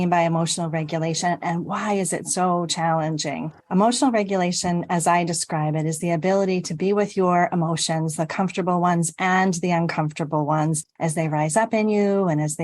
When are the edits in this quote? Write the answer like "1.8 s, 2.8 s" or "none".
3.6 s